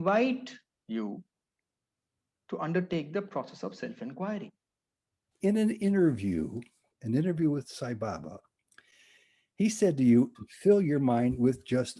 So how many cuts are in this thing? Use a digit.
2